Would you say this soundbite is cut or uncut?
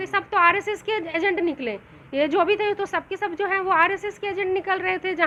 uncut